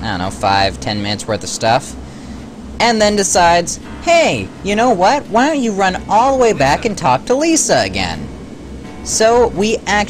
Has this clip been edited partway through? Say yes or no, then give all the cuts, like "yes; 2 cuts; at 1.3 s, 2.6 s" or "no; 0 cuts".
no; 0 cuts